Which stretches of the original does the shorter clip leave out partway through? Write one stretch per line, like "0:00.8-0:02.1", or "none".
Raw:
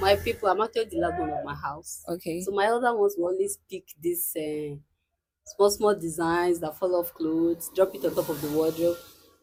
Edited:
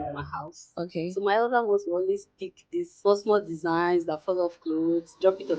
0:04.2-0:05.5